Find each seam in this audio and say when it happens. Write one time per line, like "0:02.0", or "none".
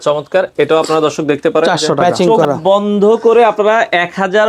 0:02.2